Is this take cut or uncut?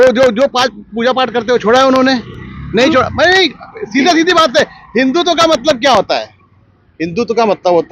uncut